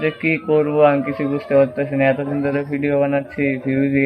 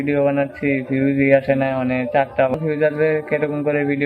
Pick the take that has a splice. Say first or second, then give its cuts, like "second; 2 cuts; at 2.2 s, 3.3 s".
second; 1 cut; at 2.5 s